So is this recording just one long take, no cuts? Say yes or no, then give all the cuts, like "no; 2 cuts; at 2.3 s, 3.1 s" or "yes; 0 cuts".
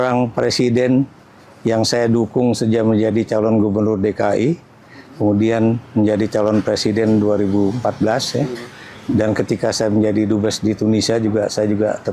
yes; 0 cuts